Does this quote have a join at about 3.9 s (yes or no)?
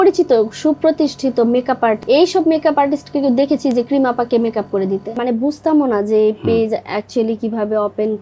no